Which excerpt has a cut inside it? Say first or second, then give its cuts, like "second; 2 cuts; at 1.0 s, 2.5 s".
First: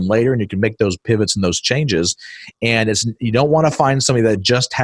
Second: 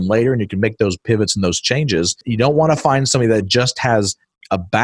second; 1 cut; at 2.2 s